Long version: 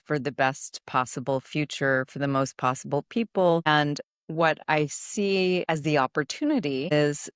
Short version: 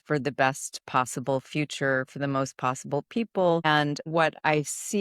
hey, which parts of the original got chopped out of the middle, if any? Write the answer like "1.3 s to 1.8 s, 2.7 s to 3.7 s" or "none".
4.0 s to 4.2 s